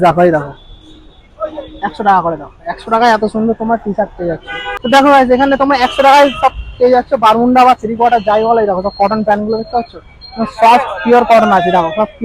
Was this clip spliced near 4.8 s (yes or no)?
yes